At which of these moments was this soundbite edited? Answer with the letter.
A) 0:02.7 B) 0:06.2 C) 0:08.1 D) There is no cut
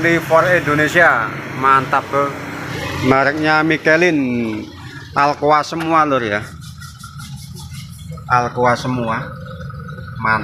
A